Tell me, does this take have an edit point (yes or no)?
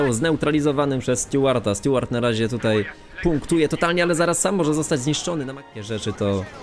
yes